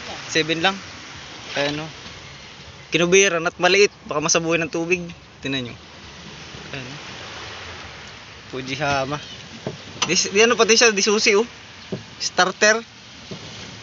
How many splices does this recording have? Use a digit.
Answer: 0